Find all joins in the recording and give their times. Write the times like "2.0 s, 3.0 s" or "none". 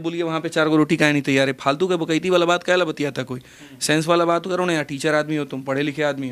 none